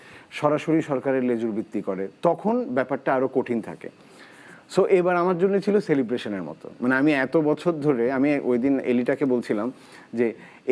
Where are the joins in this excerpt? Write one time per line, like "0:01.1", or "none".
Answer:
none